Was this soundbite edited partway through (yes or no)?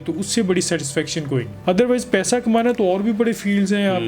no